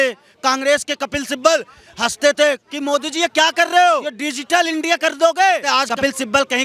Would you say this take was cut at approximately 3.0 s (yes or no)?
no